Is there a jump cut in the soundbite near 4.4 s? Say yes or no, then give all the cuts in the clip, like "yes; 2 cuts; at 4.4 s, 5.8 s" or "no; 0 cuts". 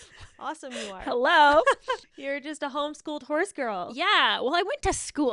no; 1 cut; at 2.1 s